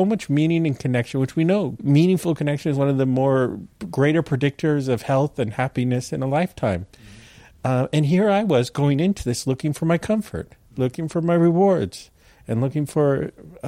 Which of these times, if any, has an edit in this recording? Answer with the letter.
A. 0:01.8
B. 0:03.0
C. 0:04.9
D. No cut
A